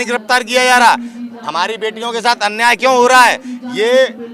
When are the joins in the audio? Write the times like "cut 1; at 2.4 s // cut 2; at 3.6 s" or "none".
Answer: none